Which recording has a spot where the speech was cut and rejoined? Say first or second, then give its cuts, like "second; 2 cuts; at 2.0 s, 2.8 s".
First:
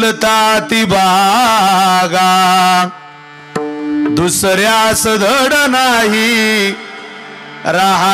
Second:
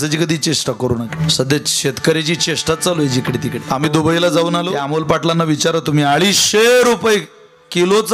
second; 3 cuts; at 1.2 s, 3.6 s, 4.8 s